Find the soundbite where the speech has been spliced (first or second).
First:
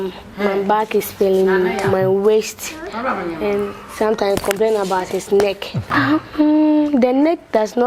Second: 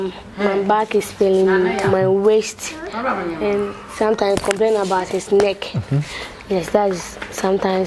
first